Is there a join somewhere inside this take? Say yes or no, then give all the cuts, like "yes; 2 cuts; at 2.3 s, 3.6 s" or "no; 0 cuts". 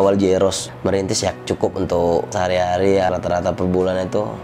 yes; 2 cuts; at 1.3 s, 3.1 s